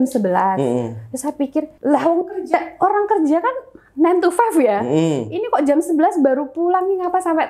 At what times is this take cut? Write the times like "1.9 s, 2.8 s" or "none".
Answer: 1.7 s